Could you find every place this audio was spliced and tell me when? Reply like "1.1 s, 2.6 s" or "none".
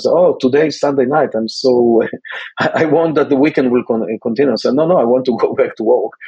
none